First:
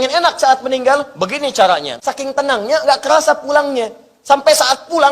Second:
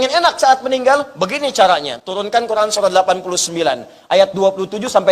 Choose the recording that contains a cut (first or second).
first